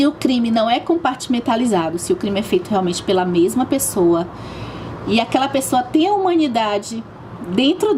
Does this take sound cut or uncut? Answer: uncut